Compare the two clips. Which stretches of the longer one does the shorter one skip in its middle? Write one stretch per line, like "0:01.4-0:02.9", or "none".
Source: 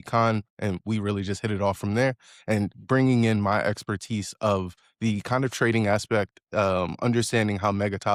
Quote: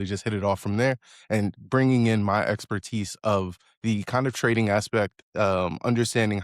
none